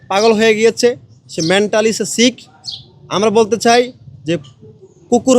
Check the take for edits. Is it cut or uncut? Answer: uncut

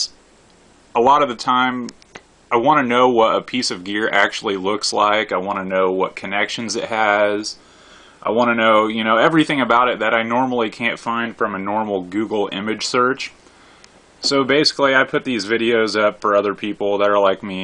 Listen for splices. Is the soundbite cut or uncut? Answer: cut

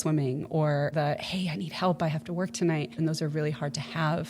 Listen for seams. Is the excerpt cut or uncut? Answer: cut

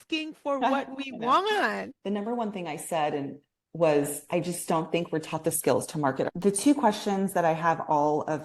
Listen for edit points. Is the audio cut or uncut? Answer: cut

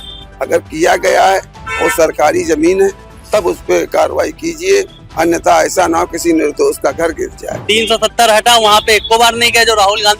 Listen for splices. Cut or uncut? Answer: cut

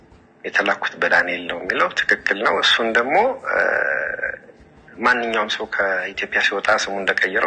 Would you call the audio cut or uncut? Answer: uncut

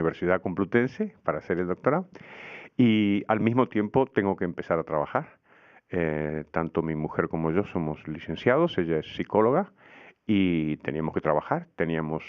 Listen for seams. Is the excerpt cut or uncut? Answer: cut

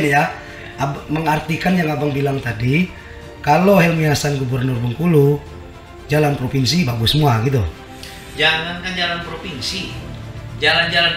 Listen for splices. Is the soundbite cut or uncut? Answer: uncut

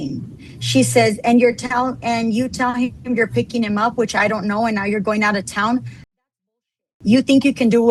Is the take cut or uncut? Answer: uncut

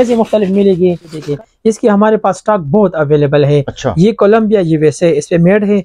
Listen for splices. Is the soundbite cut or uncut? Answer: cut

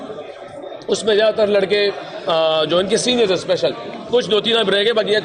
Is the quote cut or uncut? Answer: uncut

